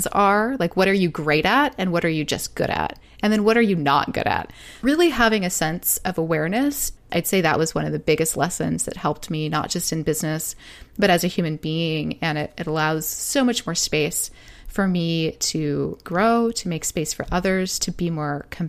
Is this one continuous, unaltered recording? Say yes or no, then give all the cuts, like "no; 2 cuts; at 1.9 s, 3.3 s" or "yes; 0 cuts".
no; 3 cuts; at 4.7 s, 7.0 s, 16.0 s